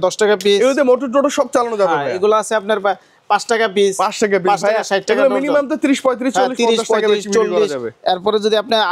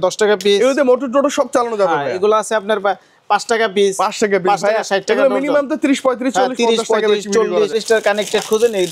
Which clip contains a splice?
second; 1 cut; at 7.8 s

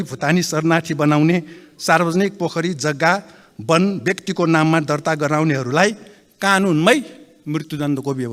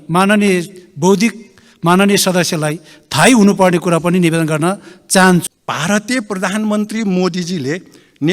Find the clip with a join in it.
second; 1 cut; at 5.5 s

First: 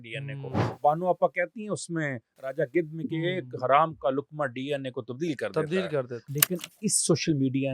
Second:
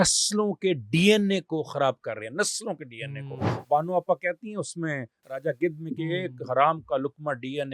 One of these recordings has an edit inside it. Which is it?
first; 1 cut; at 6.2 s

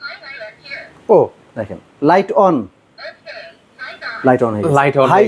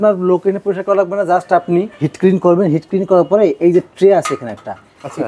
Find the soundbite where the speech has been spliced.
second; 1 cut; at 2.0 s

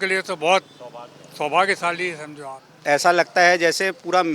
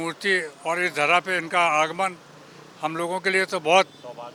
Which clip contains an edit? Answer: first; 1 cut; at 2.8 s

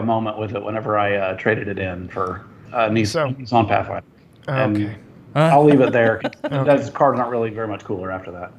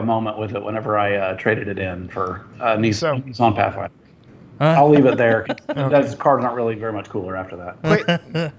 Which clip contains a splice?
second; 2 cuts; at 2.4 s, 4.3 s

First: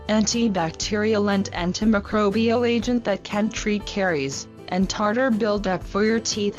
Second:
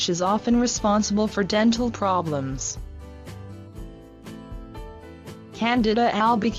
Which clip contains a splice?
second; 1 cut; at 3.6 s

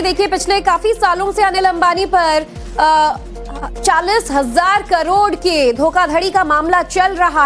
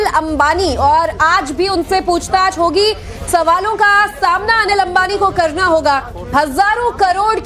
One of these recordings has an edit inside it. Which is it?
first; 1 cut; at 1.4 s

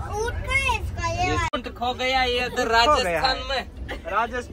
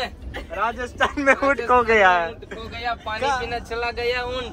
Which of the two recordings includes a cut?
first; 1 cut; at 1.5 s

